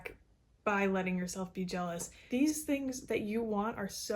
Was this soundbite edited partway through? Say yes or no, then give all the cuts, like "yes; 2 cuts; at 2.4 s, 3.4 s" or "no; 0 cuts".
yes; 1 cut; at 2.1 s